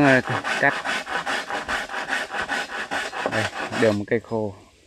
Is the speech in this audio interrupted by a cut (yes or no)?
no